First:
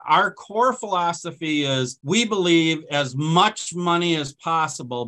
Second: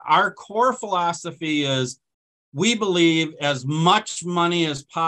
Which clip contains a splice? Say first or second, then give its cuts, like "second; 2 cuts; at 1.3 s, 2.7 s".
first; 1 cut; at 2.0 s